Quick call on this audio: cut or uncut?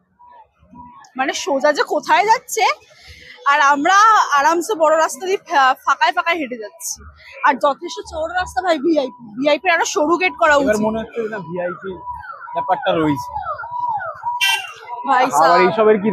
uncut